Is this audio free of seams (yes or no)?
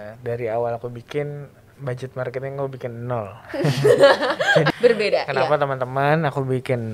no